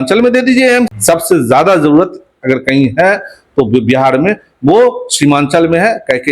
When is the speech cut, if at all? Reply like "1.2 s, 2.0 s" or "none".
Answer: 1.0 s